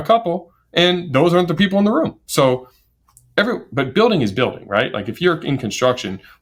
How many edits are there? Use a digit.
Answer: 0